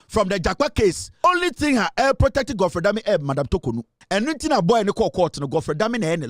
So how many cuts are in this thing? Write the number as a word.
two